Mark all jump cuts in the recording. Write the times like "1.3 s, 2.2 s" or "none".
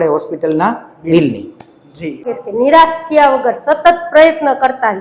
2.3 s